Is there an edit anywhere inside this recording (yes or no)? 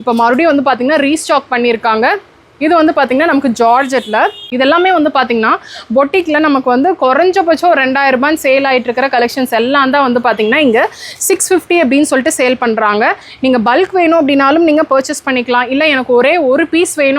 yes